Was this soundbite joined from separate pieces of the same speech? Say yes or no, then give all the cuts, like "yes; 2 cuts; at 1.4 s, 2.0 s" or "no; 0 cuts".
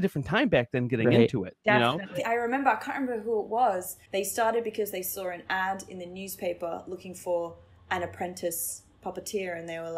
yes; 2 cuts; at 2.1 s, 4.0 s